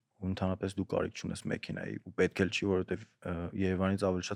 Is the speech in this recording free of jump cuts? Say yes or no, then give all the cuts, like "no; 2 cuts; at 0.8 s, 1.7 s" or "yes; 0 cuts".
yes; 0 cuts